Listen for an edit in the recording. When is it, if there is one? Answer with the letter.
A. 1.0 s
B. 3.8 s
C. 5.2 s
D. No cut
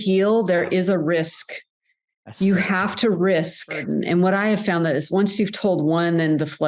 B